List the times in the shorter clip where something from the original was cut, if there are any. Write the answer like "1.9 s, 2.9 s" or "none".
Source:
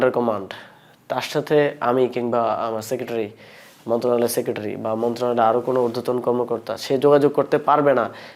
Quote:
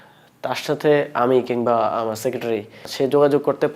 2.8 s